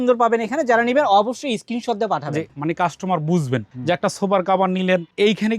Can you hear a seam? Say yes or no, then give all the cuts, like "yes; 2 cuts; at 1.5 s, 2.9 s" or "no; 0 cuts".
yes; 1 cut; at 2.5 s